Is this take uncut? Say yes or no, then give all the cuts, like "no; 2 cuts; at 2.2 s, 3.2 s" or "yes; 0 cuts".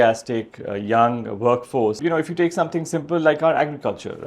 no; 1 cut; at 2.0 s